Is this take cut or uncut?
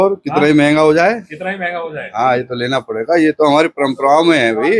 uncut